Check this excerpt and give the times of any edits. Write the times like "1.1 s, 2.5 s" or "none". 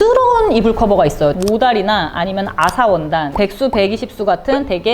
1.3 s